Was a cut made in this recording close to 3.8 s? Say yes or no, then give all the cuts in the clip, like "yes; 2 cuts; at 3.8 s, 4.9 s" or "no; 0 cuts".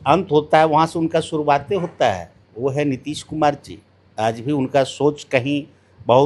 no; 0 cuts